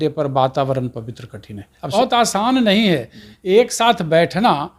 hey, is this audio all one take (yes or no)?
no